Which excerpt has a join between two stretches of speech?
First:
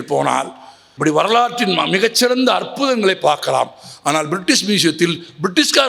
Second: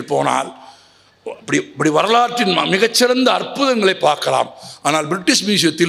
first; 1 cut; at 0.9 s

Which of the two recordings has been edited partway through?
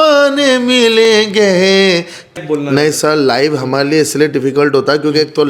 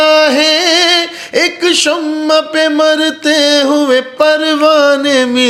first; 1 cut; at 2.3 s

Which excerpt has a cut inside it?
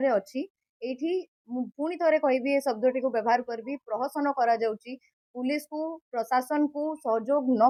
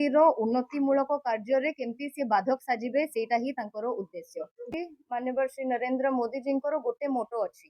second; 1 cut; at 4.7 s

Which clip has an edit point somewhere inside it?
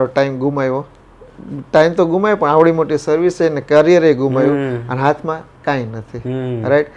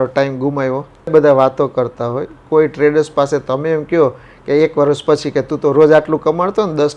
second; 1 cut; at 1.1 s

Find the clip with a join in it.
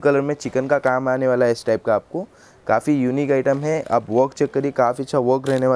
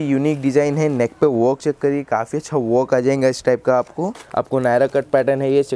second; 1 cut; at 4.2 s

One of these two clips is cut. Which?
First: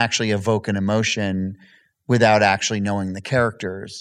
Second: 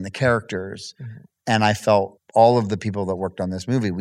second; 1 cut; at 2.1 s

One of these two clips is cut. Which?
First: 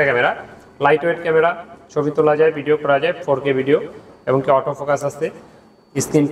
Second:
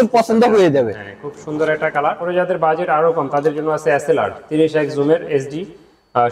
second; 1 cut; at 2.2 s

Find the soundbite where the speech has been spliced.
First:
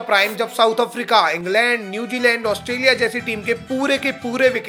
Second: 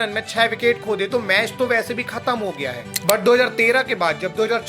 second; 1 cut; at 2.8 s

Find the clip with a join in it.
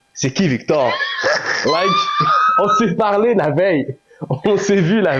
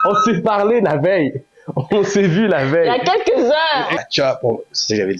second; 1 cut; at 4.0 s

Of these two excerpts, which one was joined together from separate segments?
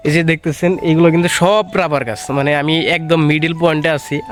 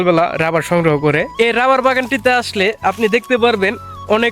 second; 1 cut; at 1.3 s

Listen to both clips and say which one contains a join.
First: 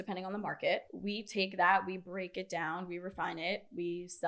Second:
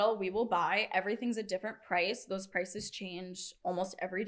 first; 1 cut; at 0.9 s

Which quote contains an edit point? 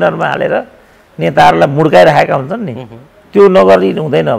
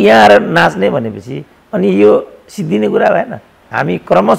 second; 1 cut; at 3.4 s

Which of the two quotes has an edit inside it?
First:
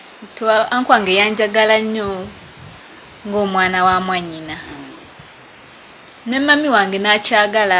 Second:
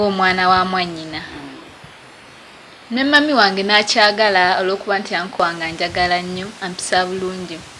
second; 1 cut; at 5.4 s

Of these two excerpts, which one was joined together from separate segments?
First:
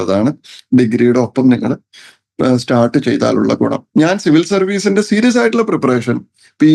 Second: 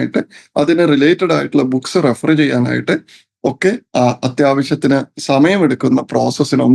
first; 1 cut; at 3.8 s

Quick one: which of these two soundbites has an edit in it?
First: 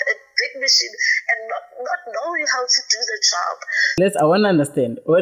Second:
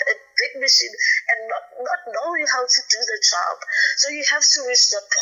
first; 1 cut; at 3.9 s

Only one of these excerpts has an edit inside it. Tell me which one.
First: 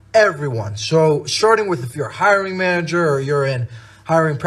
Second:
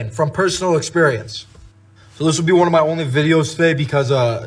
first; 1 cut; at 1.5 s

